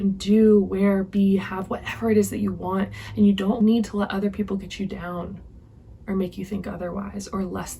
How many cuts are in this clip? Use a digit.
1